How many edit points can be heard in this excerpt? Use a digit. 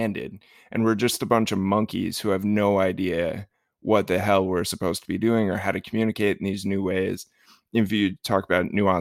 0